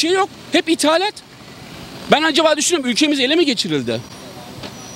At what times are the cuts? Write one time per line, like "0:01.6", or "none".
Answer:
none

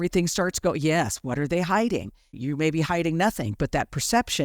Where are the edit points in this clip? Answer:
0:02.4

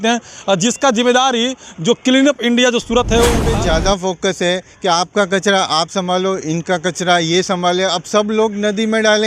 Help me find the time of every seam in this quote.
0:03.4

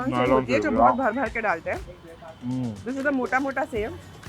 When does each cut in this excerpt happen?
none

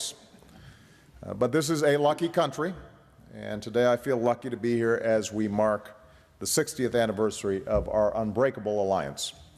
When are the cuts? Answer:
none

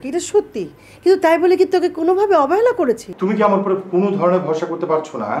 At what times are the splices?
0:03.1

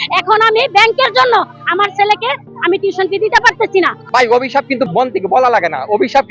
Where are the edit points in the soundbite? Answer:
0:04.0
0:04.9

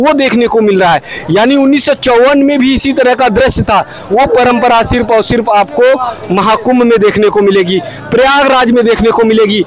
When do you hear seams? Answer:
none

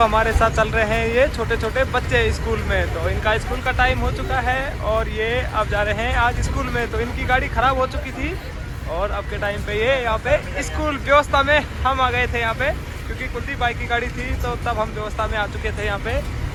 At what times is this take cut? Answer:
none

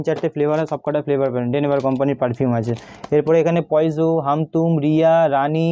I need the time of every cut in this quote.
none

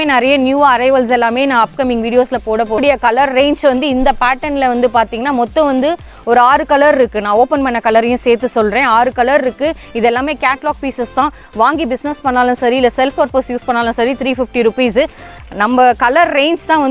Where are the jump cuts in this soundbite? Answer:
0:02.8
0:15.1

